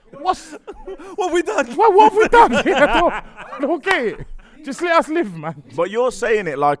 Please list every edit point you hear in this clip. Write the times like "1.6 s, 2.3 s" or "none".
5.4 s